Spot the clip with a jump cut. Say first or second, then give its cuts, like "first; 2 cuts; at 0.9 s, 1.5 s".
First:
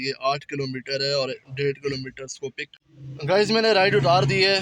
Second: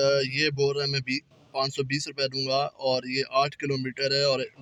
first; 1 cut; at 2.6 s